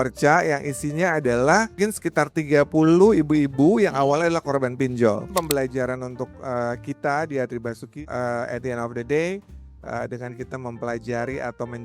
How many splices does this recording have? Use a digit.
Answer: 3